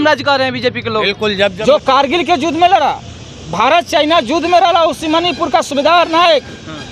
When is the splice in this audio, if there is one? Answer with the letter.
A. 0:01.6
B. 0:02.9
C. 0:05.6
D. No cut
A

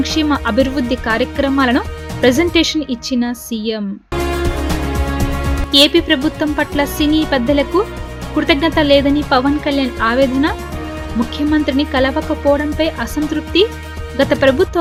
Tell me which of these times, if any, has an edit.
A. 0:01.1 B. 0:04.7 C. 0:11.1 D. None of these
D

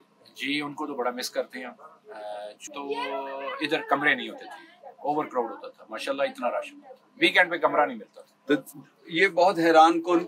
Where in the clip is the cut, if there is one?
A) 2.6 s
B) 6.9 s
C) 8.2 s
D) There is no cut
A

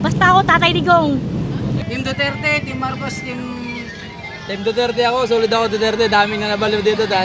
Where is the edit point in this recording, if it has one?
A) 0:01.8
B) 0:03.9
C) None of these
A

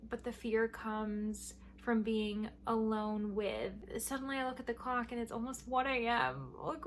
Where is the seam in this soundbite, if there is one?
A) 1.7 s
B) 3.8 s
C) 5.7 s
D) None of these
B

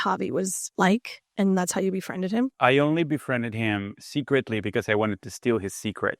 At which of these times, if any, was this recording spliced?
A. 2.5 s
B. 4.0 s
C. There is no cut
A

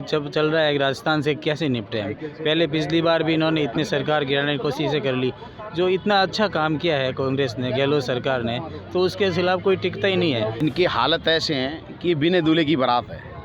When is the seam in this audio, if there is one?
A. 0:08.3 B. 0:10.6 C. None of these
B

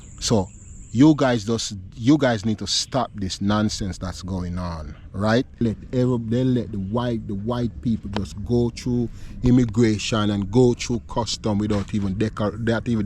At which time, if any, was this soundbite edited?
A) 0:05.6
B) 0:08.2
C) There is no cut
A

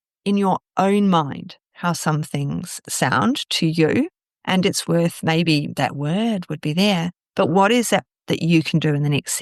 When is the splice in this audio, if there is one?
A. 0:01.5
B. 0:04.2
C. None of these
C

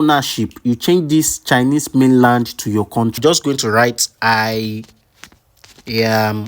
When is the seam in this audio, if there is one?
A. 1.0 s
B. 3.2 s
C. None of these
B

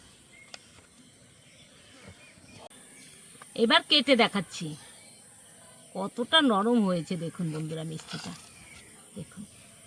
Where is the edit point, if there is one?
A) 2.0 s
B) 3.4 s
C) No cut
C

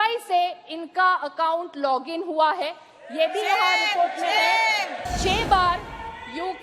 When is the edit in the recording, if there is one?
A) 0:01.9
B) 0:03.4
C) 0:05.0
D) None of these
C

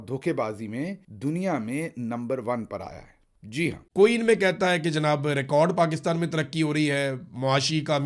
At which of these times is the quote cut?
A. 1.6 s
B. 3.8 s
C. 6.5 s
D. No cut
B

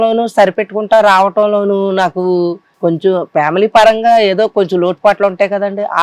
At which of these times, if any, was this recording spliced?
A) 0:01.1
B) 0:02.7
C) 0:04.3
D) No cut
B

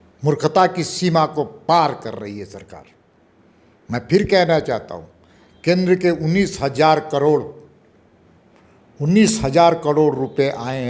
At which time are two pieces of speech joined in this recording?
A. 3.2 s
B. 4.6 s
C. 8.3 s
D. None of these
D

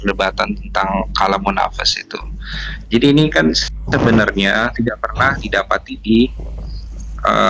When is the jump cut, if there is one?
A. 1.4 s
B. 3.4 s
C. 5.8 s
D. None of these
D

